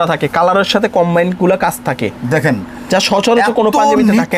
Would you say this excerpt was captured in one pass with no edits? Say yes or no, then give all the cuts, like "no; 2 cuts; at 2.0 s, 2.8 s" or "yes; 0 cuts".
yes; 0 cuts